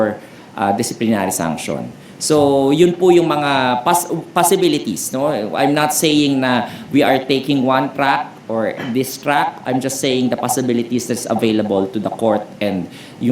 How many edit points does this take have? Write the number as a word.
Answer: zero